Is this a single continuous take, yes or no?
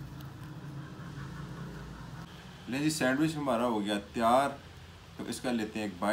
no